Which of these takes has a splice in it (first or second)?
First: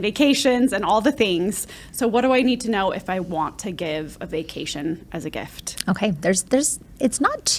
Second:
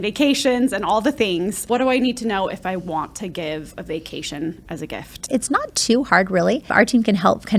second